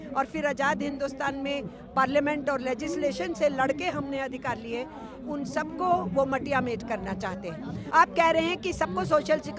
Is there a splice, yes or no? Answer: yes